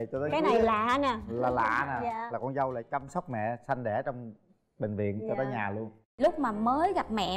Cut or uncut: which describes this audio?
cut